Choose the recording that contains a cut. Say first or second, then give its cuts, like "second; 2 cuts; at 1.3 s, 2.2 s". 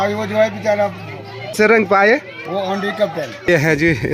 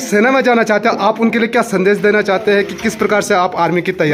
first; 2 cuts; at 1.6 s, 3.5 s